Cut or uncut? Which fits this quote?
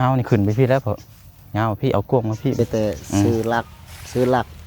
cut